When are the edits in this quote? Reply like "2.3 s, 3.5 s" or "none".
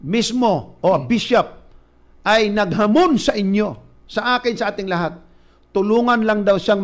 1.5 s, 5.5 s